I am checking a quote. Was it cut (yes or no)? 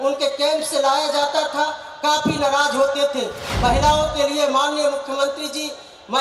yes